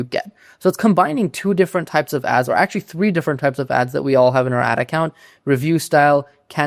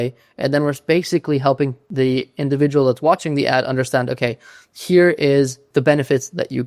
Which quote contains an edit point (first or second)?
second